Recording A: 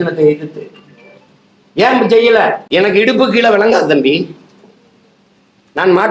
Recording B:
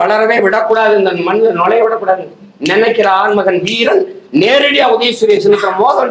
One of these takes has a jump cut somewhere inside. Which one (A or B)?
A